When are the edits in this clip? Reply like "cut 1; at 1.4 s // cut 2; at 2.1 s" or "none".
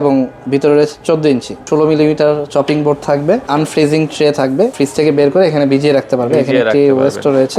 cut 1; at 1.6 s // cut 2; at 3.5 s // cut 3; at 4.7 s